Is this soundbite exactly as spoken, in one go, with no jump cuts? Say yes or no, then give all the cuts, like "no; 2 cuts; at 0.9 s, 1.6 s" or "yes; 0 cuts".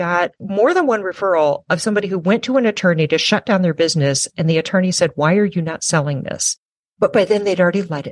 no; 1 cut; at 6.7 s